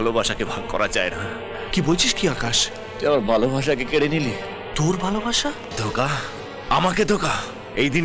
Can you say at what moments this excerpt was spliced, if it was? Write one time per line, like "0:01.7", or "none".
0:05.7